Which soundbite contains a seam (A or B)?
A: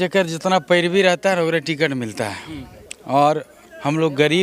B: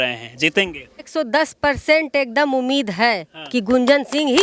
B